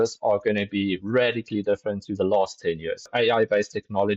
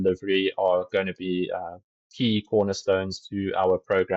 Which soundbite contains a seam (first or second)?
first